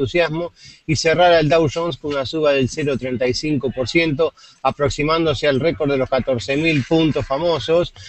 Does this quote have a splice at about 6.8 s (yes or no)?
yes